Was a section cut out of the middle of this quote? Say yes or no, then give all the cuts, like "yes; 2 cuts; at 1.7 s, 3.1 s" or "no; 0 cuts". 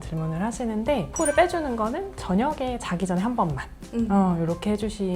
no; 0 cuts